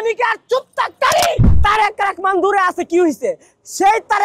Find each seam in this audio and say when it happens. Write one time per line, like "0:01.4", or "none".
0:01.5